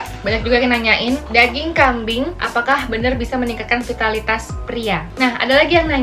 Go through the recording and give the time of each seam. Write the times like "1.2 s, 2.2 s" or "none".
5.0 s

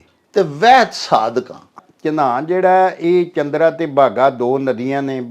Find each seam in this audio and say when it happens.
1.9 s

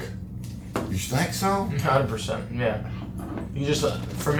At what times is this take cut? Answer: none

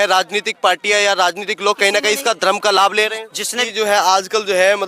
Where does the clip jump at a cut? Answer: 3.6 s

